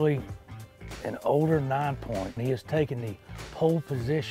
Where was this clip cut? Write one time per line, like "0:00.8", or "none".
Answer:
0:02.4